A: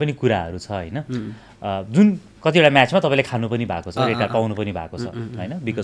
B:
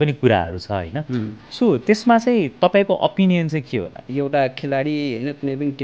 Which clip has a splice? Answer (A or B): B